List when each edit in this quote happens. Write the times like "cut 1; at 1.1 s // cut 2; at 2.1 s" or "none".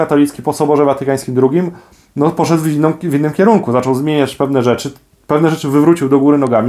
none